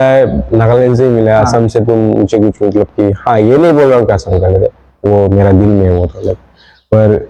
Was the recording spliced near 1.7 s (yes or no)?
no